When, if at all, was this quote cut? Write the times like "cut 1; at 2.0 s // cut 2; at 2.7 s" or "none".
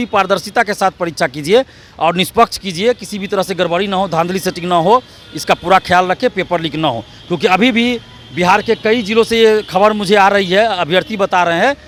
none